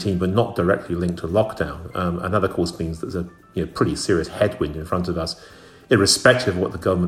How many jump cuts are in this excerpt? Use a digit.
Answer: 0